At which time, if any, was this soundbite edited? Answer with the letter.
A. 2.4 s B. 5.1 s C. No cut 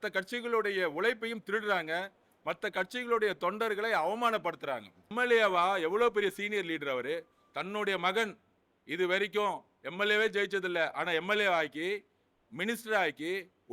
B